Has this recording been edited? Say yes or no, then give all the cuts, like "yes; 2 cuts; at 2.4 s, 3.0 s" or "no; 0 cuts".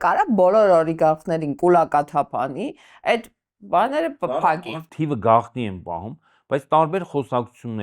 yes; 1 cut; at 4.6 s